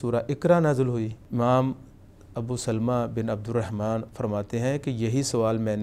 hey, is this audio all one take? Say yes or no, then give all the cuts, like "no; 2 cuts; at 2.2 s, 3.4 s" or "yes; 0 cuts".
no; 1 cut; at 1.2 s